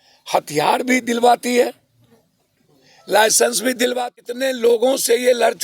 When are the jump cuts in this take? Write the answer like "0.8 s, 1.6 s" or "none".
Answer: 3.9 s